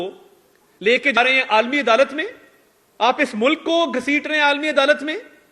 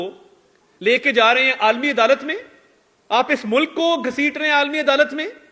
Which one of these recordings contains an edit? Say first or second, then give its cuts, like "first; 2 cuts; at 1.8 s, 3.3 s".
first; 1 cut; at 1.2 s